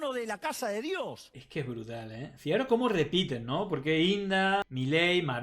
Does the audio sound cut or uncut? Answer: cut